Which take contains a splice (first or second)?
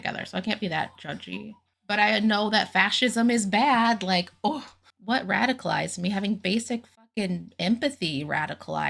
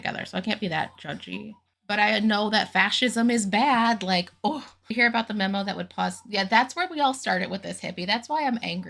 first